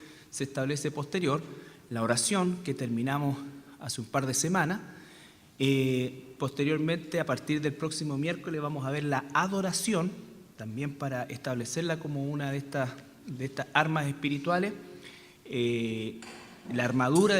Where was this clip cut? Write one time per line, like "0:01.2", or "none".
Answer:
0:06.2